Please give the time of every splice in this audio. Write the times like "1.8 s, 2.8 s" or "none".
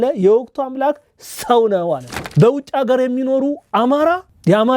2.2 s